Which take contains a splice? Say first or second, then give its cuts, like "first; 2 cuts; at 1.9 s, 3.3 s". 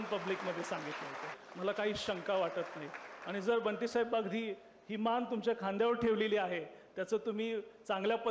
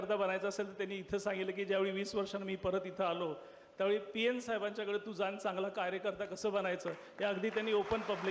first; 1 cut; at 1.4 s